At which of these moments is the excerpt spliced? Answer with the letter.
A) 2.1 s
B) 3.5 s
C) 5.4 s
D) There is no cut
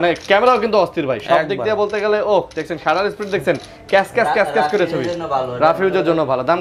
D